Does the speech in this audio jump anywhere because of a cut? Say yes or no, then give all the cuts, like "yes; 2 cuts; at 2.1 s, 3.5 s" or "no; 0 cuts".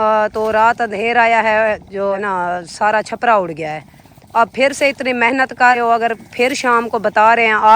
yes; 2 cuts; at 2.2 s, 5.8 s